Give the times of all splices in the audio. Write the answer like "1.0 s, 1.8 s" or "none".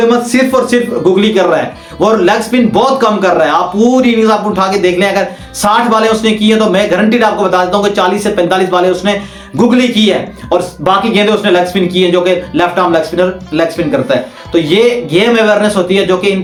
none